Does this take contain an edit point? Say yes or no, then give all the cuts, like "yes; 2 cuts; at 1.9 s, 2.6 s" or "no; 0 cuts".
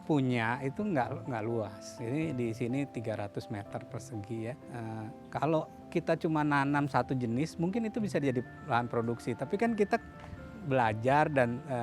yes; 1 cut; at 4.6 s